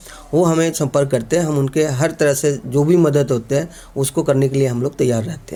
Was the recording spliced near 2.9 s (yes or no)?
no